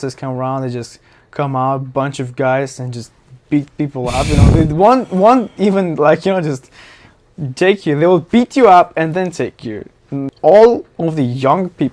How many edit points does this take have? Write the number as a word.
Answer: one